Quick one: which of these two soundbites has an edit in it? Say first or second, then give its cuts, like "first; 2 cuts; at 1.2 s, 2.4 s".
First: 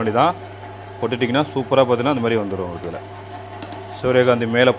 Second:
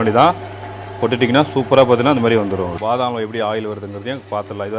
second; 1 cut; at 2.8 s